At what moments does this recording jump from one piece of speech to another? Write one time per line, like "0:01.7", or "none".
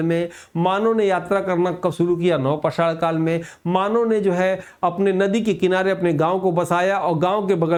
none